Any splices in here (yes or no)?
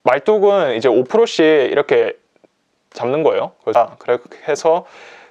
yes